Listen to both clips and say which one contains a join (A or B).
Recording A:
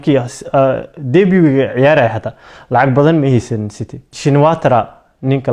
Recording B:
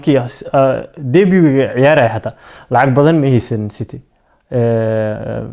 A